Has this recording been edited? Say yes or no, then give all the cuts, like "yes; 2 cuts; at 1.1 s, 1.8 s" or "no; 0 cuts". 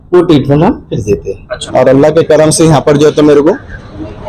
yes; 1 cut; at 1.6 s